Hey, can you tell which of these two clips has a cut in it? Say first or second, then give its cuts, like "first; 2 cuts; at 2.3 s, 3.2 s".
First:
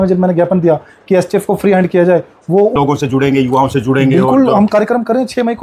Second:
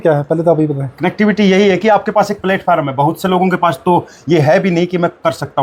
first; 1 cut; at 2.7 s